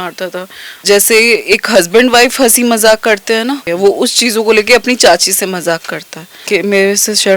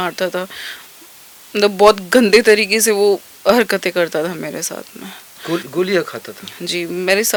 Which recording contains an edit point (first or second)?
first